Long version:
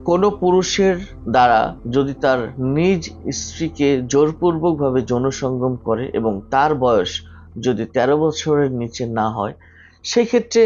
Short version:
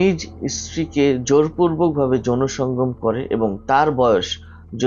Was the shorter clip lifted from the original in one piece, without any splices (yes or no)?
yes